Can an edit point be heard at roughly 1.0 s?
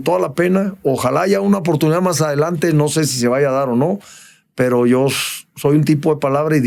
no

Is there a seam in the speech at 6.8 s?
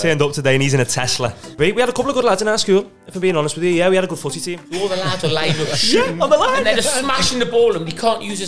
no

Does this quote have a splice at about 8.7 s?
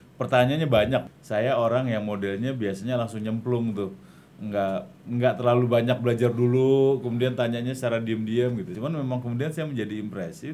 yes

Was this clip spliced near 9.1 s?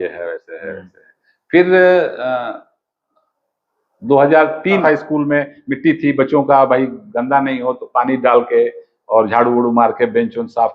no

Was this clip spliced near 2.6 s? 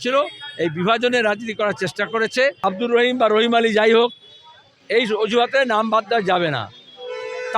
yes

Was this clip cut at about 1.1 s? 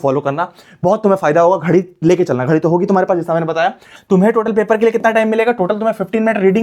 no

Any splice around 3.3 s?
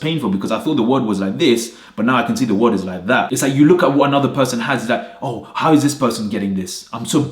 yes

